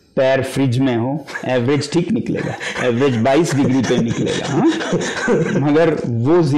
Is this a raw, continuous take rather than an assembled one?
yes; 0 cuts

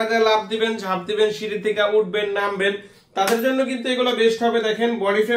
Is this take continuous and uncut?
yes; 0 cuts

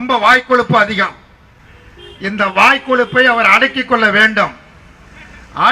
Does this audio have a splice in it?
no; 0 cuts

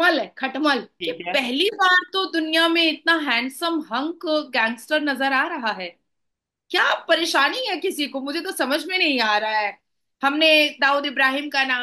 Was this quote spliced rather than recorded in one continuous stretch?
yes; 1 cut; at 0.9 s

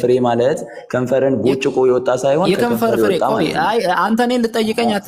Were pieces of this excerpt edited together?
no; 0 cuts

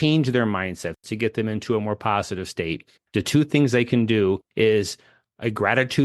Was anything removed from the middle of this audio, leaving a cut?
yes; 1 cut; at 1.0 s

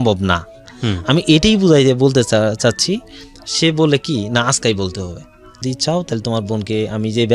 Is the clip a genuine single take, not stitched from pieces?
no; 1 cut; at 5.6 s

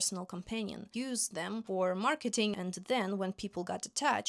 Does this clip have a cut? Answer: yes; 2 cuts; at 1.2 s, 2.6 s

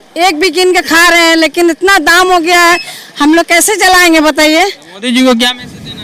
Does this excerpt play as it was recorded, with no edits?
yes; 0 cuts

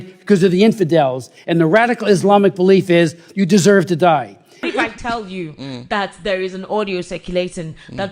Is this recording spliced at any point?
yes; 1 cut; at 4.6 s

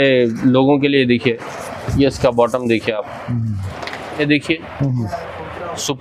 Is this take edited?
yes; 1 cut; at 4.2 s

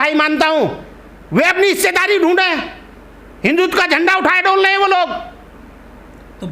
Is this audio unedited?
yes; 0 cuts

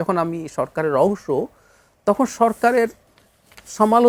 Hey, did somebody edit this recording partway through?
no; 0 cuts

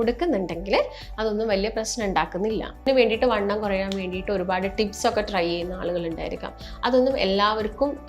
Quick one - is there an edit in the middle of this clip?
yes; 1 cut; at 2.9 s

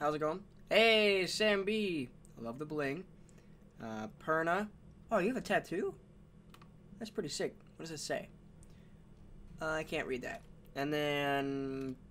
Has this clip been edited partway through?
no; 0 cuts

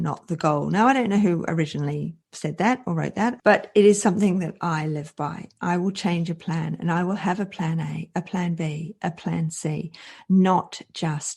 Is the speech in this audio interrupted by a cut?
yes; 1 cut; at 3.4 s

